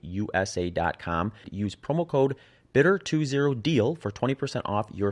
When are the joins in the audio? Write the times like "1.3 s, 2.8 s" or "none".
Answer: 1.5 s